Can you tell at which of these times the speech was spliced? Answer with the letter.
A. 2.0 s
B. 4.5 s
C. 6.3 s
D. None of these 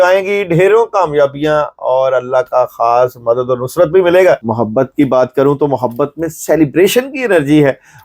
B